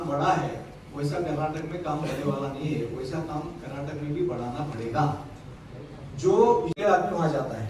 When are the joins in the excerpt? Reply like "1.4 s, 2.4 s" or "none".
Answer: 6.8 s